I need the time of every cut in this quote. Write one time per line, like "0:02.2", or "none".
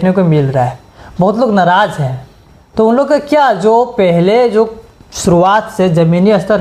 none

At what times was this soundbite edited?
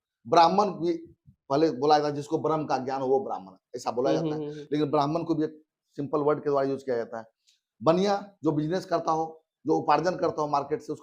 none

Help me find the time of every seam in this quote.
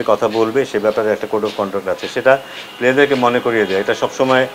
none

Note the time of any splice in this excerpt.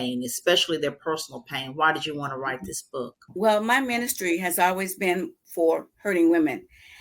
0:03.2

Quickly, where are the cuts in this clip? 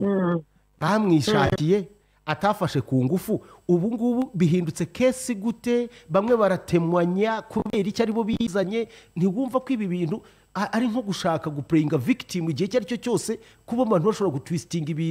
none

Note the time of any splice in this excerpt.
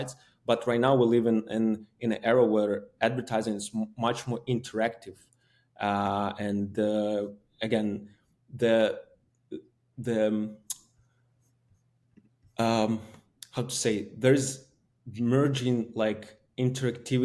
none

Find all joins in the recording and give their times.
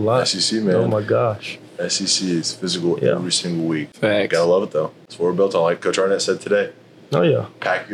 0:03.9
0:05.0

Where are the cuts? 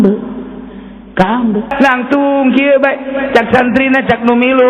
0:01.7

